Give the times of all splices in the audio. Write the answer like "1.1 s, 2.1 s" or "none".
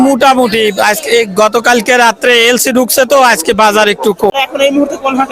4.3 s